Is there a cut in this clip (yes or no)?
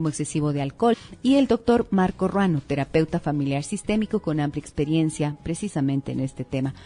no